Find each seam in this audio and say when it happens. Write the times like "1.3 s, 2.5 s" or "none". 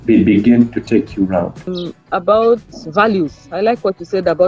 1.7 s